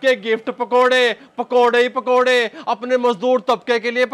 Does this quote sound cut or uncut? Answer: uncut